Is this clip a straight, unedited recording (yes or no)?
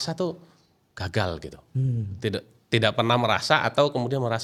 yes